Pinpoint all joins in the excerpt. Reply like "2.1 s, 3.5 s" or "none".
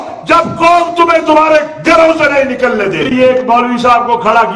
3.1 s